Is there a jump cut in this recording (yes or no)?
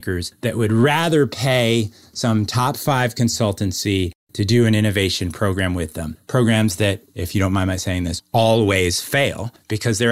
no